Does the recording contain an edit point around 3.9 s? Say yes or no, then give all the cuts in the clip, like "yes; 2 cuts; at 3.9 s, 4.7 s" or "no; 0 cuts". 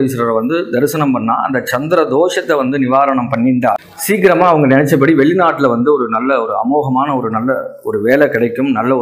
yes; 1 cut; at 3.9 s